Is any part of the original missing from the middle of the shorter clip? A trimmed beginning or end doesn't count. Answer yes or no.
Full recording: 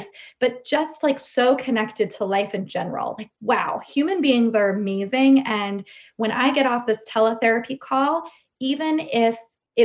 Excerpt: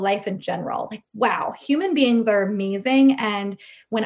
no